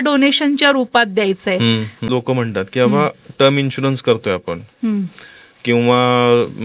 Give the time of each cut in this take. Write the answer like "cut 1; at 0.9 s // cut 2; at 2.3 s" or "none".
cut 1; at 2.0 s